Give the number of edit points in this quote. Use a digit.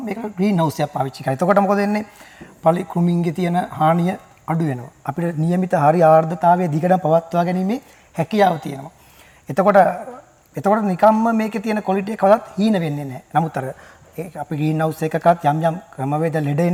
0